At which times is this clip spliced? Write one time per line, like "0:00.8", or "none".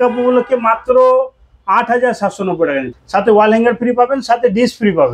0:02.9